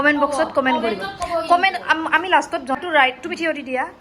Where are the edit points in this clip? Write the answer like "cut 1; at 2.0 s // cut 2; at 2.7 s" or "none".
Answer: cut 1; at 2.8 s

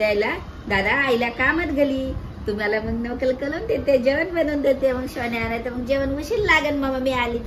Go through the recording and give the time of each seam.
none

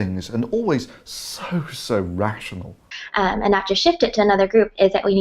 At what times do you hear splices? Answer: cut 1; at 4.1 s

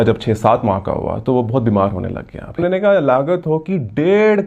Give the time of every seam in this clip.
cut 1; at 2.5 s

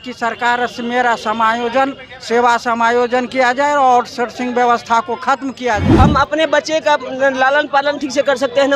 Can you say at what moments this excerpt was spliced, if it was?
cut 1; at 5.9 s

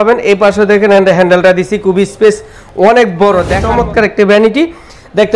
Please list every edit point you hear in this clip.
cut 1; at 3.6 s

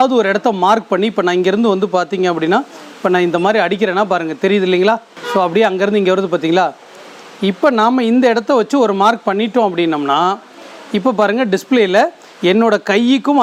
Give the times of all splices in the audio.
none

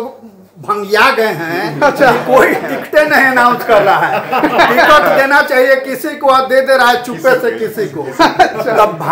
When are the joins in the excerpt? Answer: none

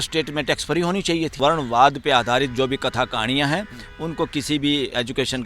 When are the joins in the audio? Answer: cut 1; at 1.4 s

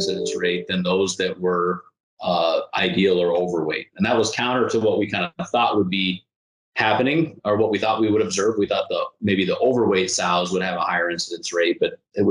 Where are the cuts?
none

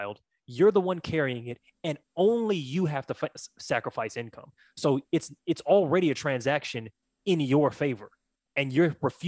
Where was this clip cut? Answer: none

